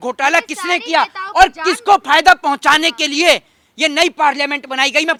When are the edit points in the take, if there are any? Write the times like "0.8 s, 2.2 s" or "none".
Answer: none